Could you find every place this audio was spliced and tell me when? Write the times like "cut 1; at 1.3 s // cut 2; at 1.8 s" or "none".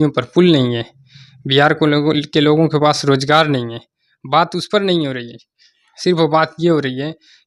none